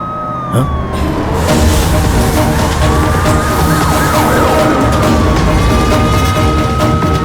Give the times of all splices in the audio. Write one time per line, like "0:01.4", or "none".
none